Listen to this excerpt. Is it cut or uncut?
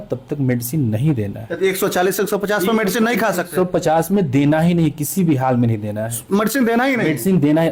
uncut